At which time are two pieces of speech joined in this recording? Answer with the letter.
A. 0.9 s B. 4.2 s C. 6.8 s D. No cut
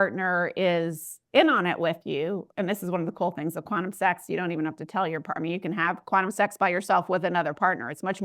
D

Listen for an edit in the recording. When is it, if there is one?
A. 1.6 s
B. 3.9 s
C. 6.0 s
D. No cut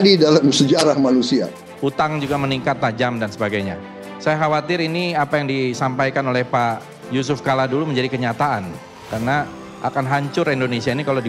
A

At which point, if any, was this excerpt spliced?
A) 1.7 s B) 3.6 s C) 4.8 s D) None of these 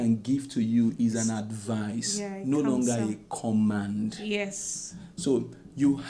D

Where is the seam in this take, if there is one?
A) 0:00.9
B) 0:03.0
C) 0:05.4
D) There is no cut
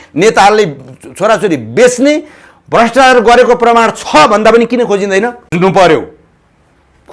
D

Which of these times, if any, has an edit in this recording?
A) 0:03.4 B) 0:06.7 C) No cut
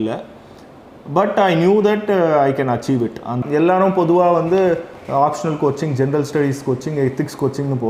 A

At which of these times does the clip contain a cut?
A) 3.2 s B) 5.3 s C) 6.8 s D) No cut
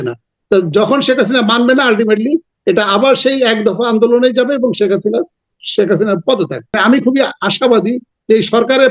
C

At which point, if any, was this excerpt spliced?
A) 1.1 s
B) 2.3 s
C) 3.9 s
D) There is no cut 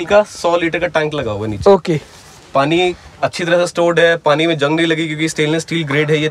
D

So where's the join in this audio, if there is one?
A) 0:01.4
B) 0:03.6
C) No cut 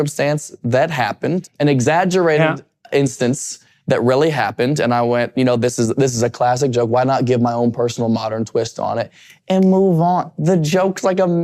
A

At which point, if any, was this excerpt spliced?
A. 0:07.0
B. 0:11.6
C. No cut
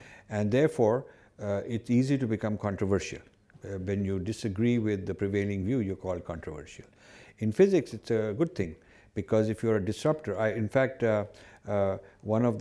C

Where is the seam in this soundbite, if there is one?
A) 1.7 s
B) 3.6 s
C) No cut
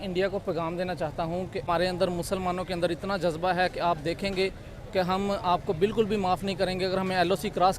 A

